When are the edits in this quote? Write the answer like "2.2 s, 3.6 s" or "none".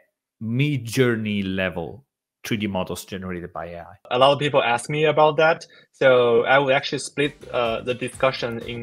4.1 s